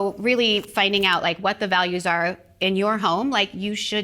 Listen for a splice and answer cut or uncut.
uncut